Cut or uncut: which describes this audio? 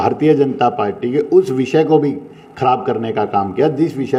uncut